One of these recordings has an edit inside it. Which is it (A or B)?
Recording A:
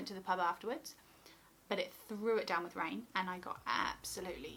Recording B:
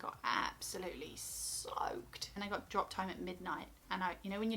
B